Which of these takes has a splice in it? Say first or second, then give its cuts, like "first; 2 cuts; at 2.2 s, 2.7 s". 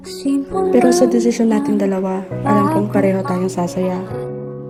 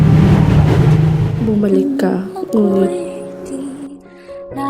second; 1 cut; at 1.3 s